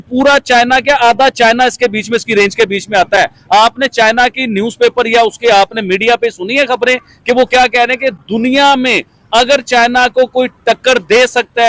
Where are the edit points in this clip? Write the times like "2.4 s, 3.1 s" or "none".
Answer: none